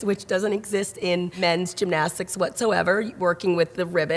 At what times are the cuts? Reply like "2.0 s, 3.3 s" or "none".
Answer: 1.3 s